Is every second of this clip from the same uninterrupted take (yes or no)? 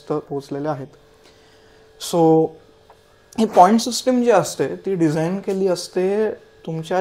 yes